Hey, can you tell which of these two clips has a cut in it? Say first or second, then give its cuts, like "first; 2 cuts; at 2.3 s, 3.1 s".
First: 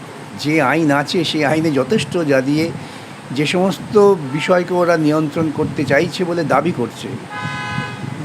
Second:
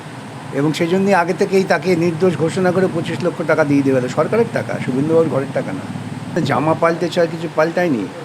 second; 1 cut; at 6.4 s